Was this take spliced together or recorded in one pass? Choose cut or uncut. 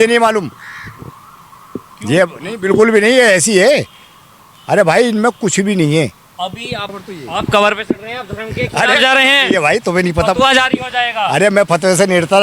cut